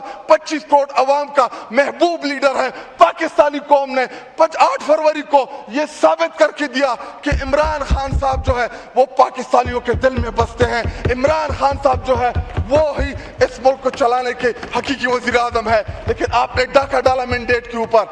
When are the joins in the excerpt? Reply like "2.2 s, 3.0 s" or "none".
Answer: none